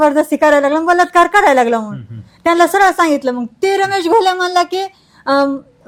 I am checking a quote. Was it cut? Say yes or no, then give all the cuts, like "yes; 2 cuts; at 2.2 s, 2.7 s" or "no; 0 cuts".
no; 0 cuts